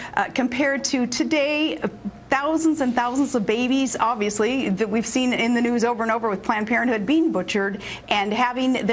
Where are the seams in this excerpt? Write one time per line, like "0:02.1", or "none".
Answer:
0:03.3